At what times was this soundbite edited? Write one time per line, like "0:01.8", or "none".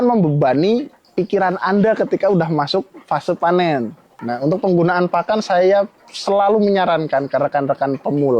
0:04.2